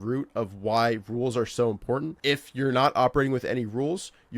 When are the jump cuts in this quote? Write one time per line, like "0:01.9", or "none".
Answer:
0:02.1